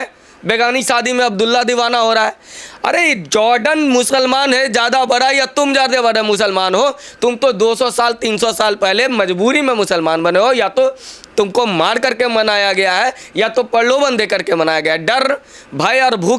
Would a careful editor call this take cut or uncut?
uncut